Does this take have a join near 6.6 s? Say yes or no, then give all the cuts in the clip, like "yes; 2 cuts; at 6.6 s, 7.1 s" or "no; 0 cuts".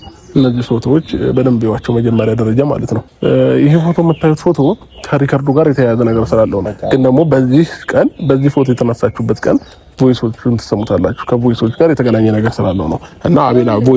yes; 2 cuts; at 3.1 s, 6.6 s